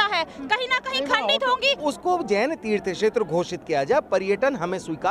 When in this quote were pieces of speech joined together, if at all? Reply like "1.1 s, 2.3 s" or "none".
1.8 s